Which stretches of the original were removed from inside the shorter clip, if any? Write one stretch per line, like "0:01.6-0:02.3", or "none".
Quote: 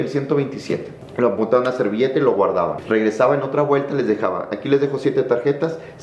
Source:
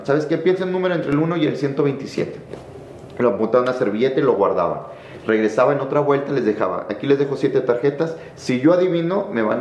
0:02.4-0:03.0
0:04.8-0:05.2